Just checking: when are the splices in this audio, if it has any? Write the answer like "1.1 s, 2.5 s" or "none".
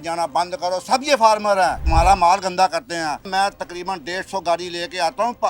1.8 s, 3.3 s

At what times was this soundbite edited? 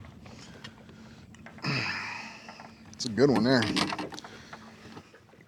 3.7 s

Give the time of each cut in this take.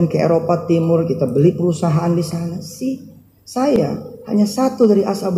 3.8 s

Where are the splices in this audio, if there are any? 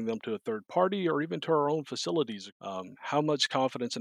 2.4 s

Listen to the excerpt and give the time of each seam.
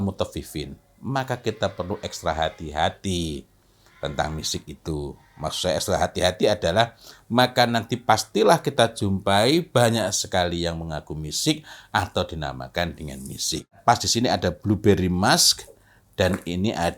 13.8 s

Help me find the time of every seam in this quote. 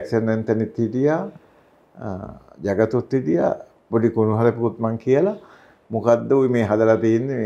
none

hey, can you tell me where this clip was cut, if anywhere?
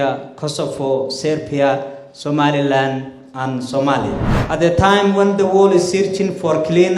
4.3 s

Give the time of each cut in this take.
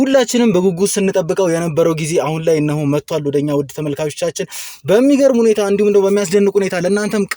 none

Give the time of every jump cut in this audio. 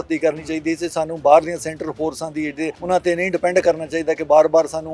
2.8 s

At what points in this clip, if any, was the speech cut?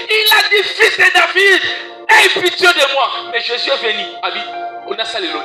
none

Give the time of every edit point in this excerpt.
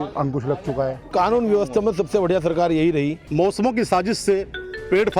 1.1 s, 3.2 s

